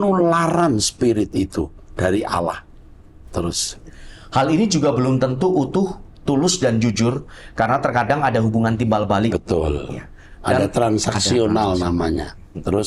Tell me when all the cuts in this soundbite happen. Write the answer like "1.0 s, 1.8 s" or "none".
none